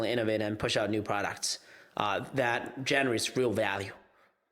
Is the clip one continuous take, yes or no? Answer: yes